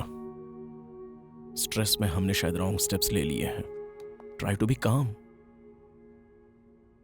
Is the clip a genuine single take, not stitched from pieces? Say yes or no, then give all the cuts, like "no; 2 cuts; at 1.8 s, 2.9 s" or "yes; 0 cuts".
yes; 0 cuts